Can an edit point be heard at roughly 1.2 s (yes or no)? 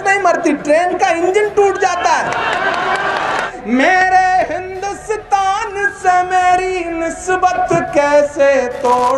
no